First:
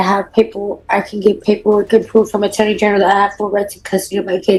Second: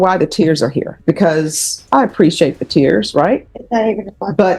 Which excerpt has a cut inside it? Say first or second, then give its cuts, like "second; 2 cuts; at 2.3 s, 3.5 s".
second; 3 cuts; at 0.9 s, 1.8 s, 3.5 s